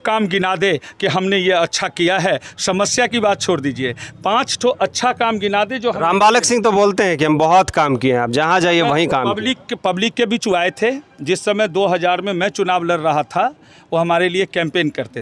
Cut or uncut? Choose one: uncut